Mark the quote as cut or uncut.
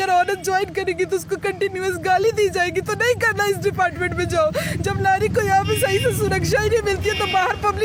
uncut